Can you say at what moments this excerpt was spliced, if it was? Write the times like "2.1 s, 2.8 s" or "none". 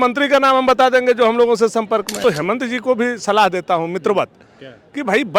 2.2 s